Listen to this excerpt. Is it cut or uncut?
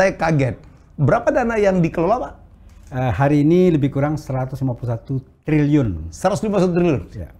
uncut